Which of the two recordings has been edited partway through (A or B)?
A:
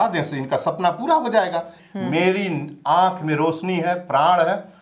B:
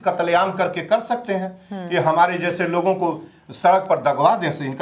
A